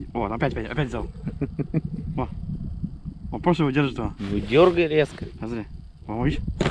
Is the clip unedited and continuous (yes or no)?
yes